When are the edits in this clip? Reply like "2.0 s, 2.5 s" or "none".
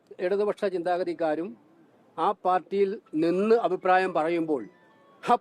none